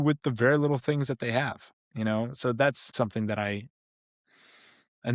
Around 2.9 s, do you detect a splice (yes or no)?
yes